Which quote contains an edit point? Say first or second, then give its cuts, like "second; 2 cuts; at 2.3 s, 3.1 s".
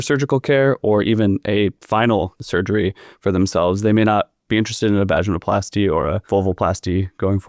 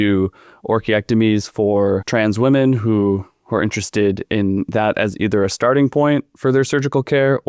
first; 3 cuts; at 1.8 s, 2.4 s, 6.2 s